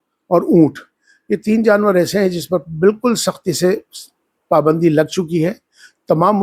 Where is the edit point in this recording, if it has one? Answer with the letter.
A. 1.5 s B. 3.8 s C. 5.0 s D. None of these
D